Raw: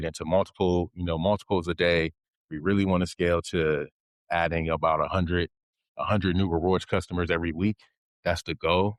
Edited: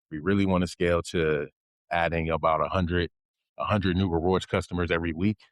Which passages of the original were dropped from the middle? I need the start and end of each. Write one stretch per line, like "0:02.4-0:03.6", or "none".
none

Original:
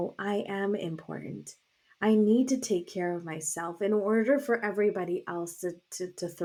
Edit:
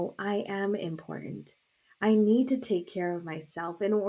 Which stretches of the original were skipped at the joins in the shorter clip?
none

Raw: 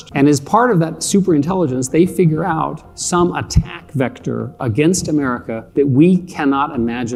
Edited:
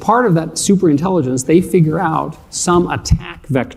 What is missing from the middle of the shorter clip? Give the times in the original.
none

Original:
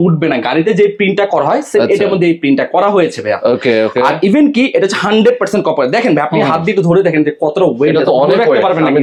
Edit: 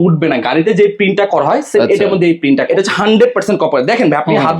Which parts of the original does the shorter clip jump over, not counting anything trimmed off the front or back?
0:02.7-0:04.7

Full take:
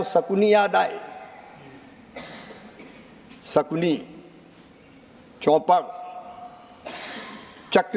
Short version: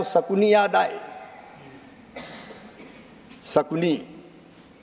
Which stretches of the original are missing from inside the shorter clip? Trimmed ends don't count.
none

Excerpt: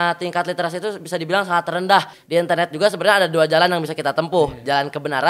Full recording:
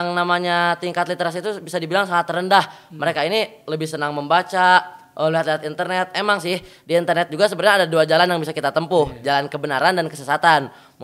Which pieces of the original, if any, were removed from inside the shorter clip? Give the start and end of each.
0:02.8-0:06.8

